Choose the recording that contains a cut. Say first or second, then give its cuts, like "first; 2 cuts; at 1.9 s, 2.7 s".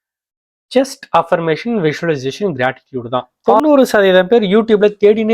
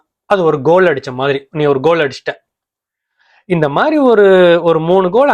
first; 1 cut; at 3.6 s